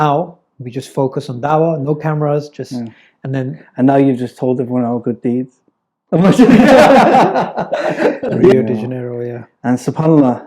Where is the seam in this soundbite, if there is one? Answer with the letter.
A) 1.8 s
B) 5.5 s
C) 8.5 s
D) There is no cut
C